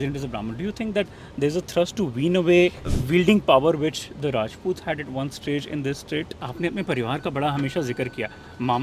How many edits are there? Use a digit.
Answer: 2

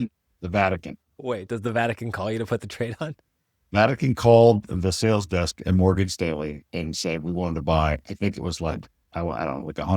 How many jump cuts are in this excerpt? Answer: 2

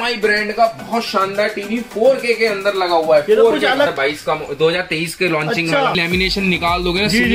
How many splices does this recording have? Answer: 2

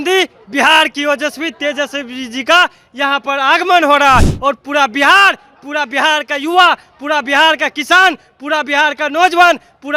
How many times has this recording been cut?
0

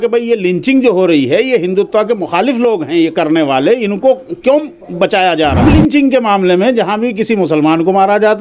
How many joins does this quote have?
1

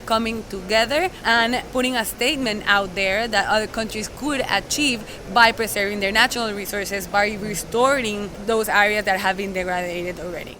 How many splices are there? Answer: 3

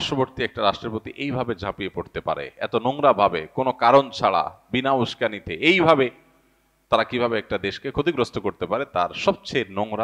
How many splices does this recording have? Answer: 0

